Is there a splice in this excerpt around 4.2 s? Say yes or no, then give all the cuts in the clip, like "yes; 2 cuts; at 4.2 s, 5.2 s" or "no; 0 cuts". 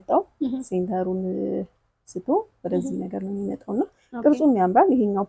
no; 0 cuts